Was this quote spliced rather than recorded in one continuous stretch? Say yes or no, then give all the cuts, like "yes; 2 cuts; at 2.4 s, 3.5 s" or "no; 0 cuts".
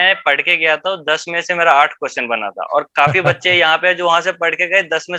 no; 0 cuts